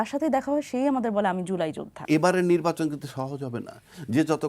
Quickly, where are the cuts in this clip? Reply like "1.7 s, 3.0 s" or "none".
2.0 s